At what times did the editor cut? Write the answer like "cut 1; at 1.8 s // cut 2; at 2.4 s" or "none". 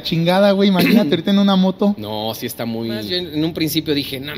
cut 1; at 3.1 s